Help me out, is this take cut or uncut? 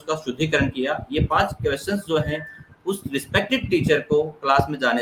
uncut